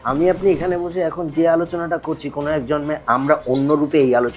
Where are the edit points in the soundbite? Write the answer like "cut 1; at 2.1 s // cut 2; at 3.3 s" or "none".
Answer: none

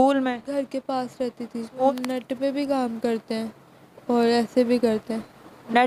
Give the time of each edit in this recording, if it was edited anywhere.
cut 1; at 1.9 s

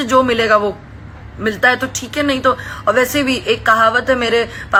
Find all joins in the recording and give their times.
none

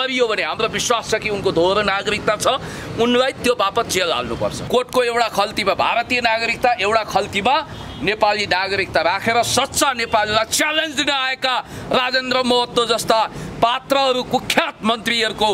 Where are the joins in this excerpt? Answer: cut 1; at 4.6 s

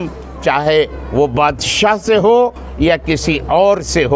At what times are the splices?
none

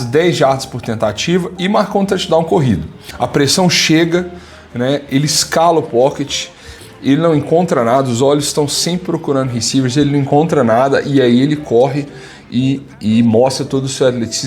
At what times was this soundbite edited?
cut 1; at 3.0 s

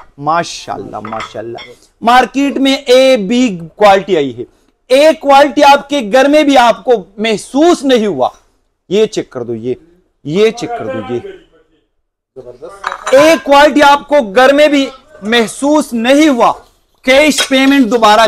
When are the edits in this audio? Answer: none

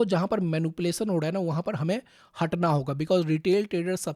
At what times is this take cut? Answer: none

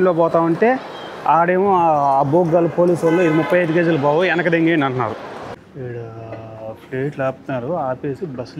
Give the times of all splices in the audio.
cut 1; at 5.6 s

